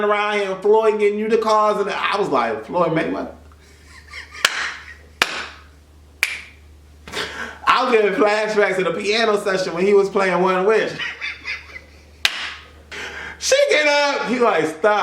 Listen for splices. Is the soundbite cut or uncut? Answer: cut